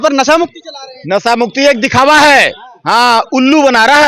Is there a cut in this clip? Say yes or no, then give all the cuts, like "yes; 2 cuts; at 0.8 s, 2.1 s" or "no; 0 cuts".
no; 0 cuts